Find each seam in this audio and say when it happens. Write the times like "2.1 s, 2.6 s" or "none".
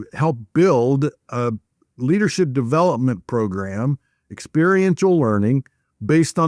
none

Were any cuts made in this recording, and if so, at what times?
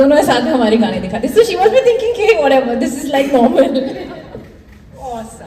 none

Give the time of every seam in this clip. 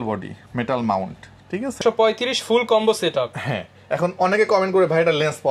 1.8 s

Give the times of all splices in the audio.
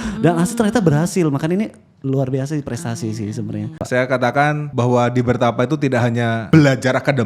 3.8 s, 4.6 s, 6.5 s

